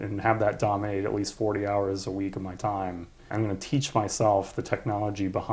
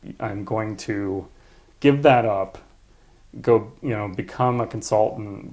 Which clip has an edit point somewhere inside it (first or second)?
first